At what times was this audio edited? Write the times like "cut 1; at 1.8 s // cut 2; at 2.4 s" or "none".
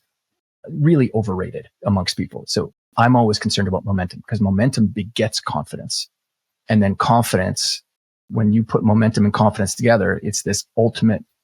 cut 1; at 1.7 s // cut 2; at 3.8 s // cut 3; at 6.0 s